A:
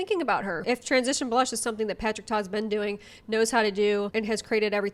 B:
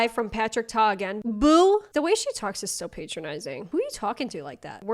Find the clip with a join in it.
B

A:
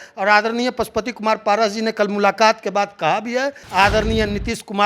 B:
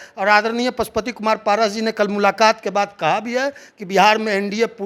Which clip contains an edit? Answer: A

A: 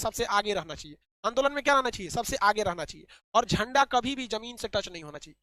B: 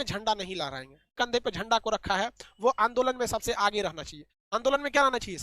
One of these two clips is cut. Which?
B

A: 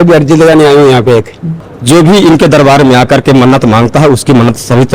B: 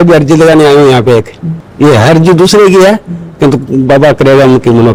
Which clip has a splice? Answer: A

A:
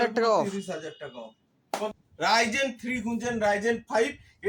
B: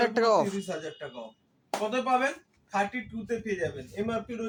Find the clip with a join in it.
A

